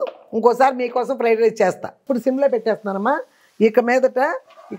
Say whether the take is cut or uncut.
cut